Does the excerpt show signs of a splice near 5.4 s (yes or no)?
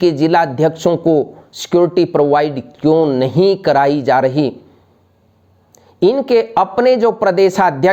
no